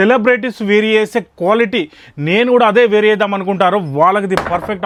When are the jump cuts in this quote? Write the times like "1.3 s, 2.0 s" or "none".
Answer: none

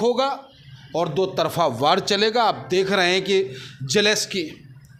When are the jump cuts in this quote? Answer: none

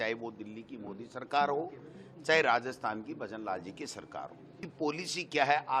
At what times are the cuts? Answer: 4.6 s

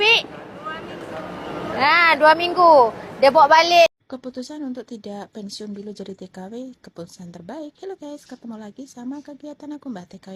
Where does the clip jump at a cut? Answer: 3.9 s

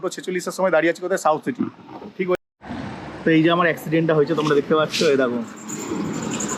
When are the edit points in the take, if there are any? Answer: 2.4 s

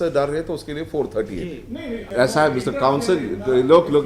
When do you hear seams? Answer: 2.0 s

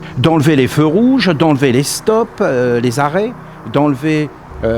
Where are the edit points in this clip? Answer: none

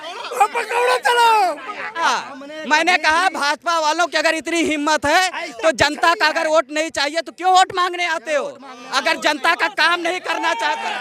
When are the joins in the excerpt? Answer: 2.0 s

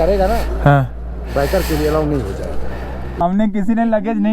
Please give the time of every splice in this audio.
3.2 s

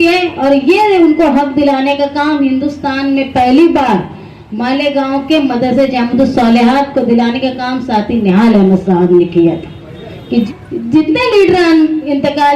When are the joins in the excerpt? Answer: 10.5 s

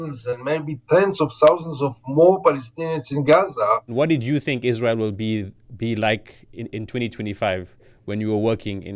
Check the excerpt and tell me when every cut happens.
3.9 s

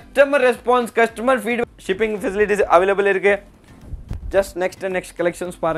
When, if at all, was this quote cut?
1.6 s

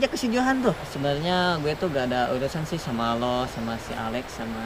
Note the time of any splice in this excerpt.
0.9 s

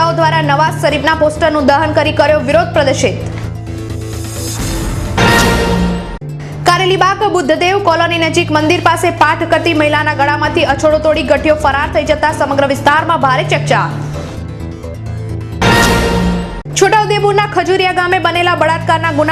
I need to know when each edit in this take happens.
none

